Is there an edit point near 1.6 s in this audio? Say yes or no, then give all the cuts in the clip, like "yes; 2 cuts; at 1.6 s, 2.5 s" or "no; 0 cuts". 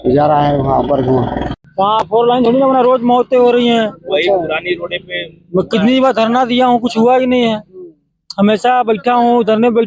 yes; 1 cut; at 1.6 s